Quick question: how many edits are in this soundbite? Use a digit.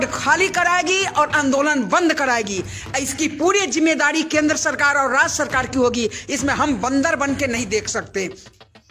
0